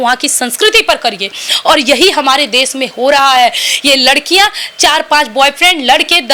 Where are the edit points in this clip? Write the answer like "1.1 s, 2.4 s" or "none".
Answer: none